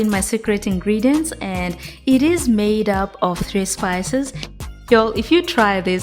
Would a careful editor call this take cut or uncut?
cut